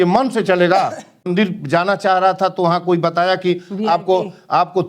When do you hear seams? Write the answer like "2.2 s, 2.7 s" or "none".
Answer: 1.3 s